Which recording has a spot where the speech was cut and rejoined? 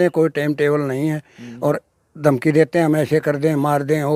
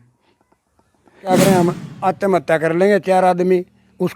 second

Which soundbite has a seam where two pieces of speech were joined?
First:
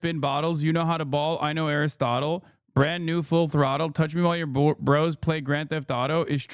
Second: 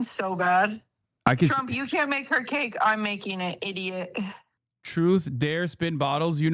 second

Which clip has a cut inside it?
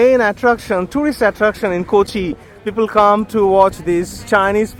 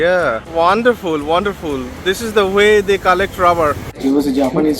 second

